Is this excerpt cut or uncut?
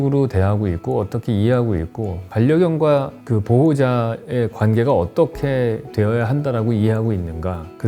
uncut